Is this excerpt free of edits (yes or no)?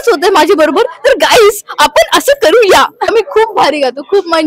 no